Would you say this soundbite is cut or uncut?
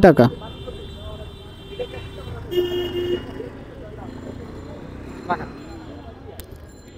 uncut